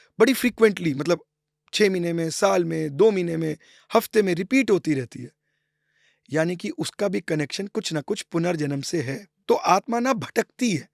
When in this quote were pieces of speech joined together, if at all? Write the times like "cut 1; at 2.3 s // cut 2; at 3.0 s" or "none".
cut 1; at 9.3 s